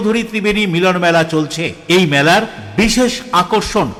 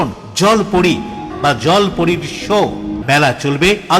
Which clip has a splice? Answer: second; 2 cuts; at 1.3 s, 3.0 s

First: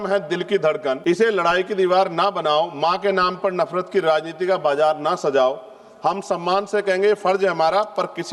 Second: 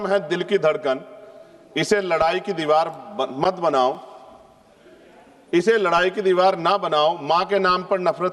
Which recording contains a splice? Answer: first; 1 cut; at 1.0 s

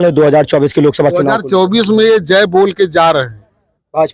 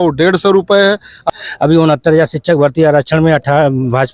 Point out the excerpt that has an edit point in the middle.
second; 1 cut; at 1.3 s

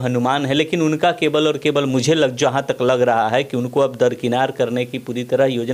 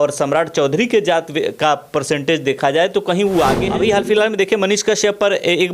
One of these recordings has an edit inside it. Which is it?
second; 1 cut; at 3.6 s

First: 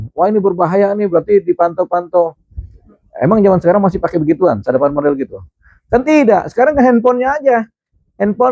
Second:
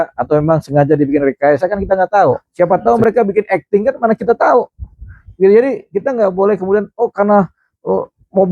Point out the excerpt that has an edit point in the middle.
second; 1 cut; at 2.5 s

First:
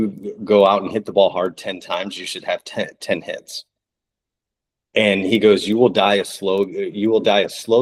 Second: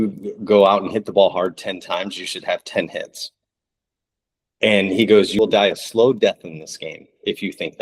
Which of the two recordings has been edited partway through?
second; 2 cuts; at 2.7 s, 5.4 s

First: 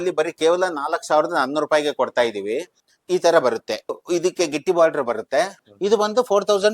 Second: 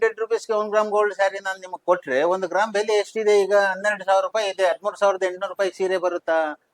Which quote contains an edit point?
first; 3 cuts; at 2.7 s, 4.0 s, 5.6 s

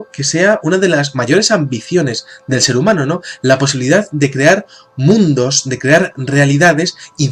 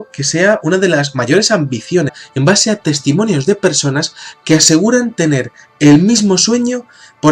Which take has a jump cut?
first; 1 cut; at 2.2 s

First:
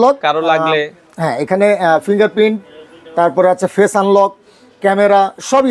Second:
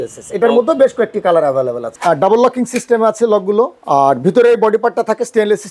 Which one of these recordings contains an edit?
second; 2 cuts; at 2.0 s, 3.8 s

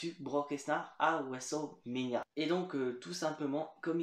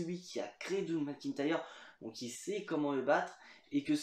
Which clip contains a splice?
first; 1 cut; at 2.3 s

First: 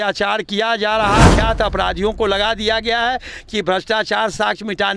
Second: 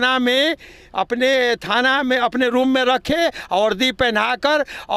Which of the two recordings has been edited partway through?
first; 1 cut; at 1.3 s

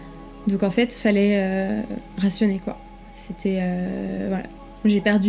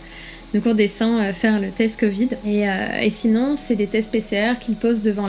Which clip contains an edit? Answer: second; 1 cut; at 2.4 s

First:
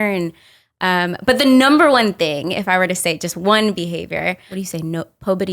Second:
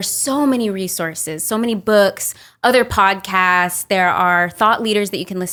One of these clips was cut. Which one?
first; 1 cut; at 4.5 s

